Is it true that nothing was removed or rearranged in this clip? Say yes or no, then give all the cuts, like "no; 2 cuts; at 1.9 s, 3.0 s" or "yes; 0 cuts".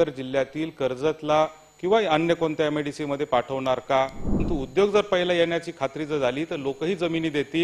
no; 1 cut; at 4.4 s